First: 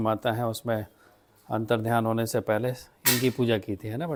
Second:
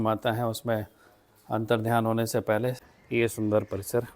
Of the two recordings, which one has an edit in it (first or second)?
second